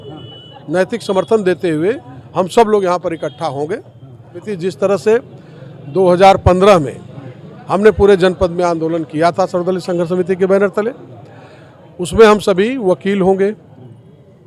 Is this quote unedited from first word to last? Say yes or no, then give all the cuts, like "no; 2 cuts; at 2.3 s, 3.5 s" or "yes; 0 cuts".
no; 1 cut; at 4.4 s